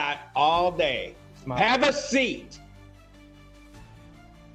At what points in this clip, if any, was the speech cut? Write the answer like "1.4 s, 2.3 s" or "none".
none